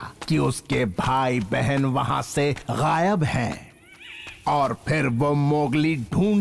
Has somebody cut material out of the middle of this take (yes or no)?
no